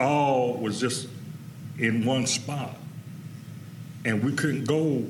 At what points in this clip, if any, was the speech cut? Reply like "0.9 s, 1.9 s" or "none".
none